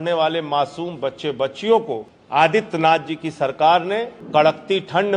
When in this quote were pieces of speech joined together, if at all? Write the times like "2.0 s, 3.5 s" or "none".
2.1 s, 4.1 s